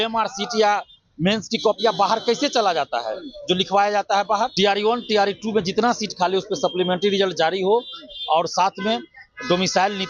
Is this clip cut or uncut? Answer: cut